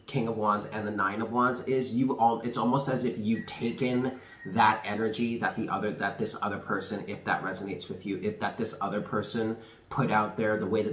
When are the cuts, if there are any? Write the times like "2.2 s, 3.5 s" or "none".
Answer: none